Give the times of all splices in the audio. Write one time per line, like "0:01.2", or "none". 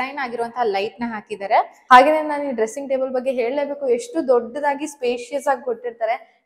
0:01.8